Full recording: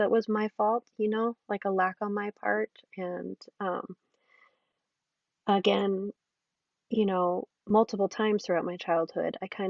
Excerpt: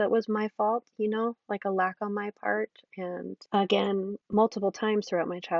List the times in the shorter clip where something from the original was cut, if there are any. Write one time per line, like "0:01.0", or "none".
0:03.4
0:04.2